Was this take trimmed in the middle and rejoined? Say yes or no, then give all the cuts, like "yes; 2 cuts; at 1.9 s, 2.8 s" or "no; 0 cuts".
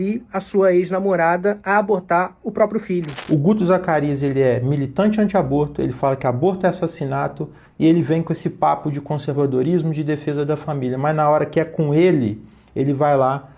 yes; 1 cut; at 3.1 s